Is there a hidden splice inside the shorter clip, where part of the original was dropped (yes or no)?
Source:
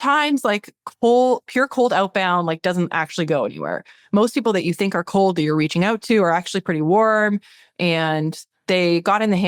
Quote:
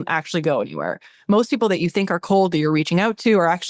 no